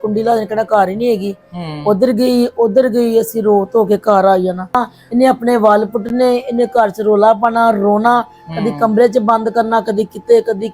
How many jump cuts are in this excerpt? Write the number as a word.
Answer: one